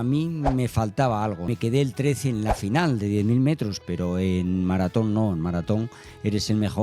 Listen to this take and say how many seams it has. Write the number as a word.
two